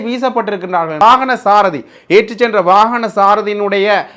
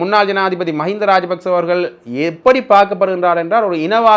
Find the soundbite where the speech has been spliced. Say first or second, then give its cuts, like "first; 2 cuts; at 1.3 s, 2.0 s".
first; 1 cut; at 1.0 s